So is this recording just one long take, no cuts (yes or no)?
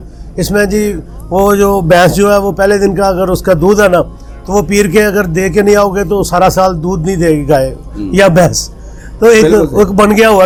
yes